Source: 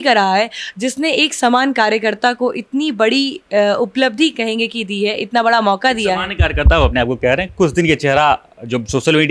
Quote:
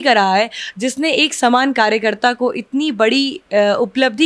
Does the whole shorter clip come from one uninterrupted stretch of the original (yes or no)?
yes